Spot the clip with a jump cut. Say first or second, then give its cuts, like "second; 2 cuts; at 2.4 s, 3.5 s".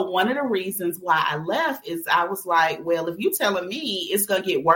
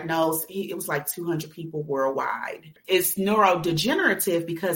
second; 1 cut; at 2.7 s